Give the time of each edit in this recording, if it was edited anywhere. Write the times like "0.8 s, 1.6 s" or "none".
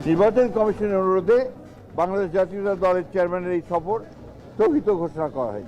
none